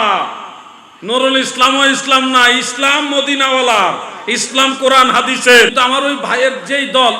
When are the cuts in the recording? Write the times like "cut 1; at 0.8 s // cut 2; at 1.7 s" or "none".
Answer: cut 1; at 5.7 s